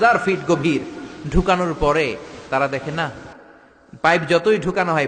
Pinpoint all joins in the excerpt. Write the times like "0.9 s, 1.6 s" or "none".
none

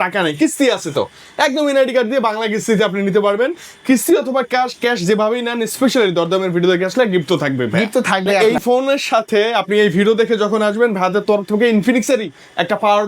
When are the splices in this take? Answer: 8.4 s

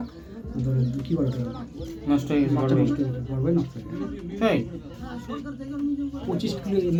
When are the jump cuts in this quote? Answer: none

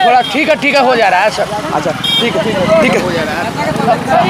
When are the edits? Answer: none

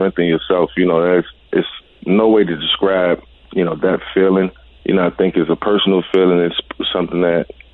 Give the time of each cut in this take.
3.3 s, 4.7 s

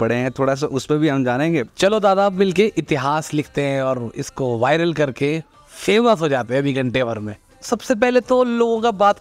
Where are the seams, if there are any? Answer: 1.7 s, 7.4 s

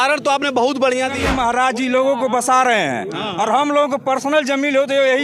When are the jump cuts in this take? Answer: 1.2 s

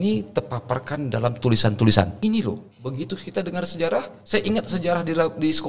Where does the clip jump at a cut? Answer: 2.1 s

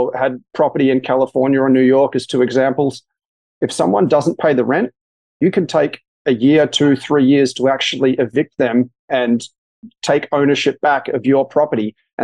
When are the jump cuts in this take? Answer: none

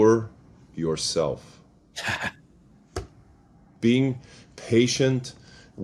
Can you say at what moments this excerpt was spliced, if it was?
3.7 s

